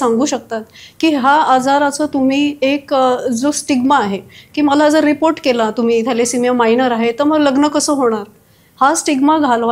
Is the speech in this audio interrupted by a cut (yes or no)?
no